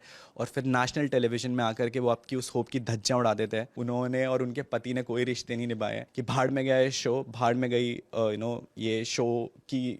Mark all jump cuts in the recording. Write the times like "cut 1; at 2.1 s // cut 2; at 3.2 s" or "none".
cut 1; at 3.7 s // cut 2; at 6.1 s